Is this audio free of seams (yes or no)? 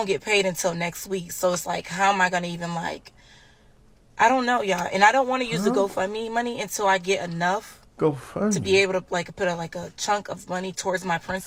yes